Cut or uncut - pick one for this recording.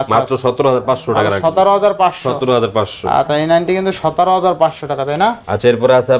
uncut